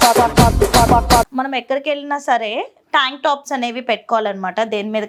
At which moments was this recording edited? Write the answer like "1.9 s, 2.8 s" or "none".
none